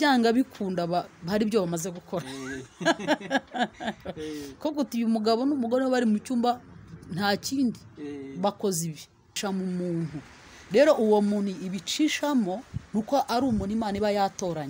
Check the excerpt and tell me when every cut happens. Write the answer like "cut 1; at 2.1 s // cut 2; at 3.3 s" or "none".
cut 1; at 9.4 s